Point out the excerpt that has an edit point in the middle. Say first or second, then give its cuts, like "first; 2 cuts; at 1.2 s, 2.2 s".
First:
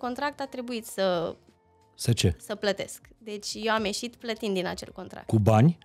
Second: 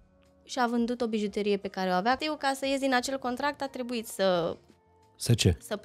second; 1 cut; at 2.2 s